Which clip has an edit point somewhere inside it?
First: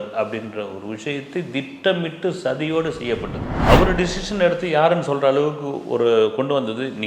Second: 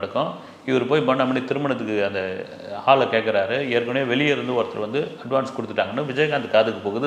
first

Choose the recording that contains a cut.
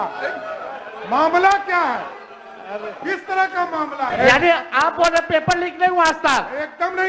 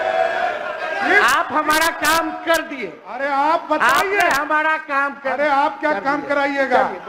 first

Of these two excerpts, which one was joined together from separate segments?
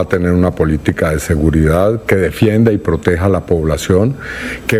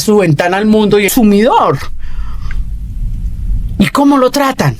second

